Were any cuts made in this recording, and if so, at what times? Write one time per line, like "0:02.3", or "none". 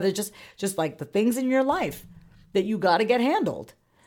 none